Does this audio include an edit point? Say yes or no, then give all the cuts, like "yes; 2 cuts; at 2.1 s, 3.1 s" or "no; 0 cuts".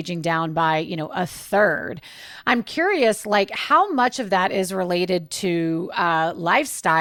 no; 0 cuts